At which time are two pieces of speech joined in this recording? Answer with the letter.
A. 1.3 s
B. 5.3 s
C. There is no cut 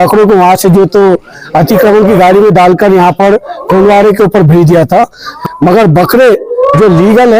B